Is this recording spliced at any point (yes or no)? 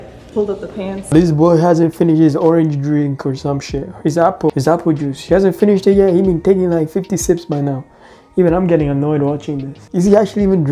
no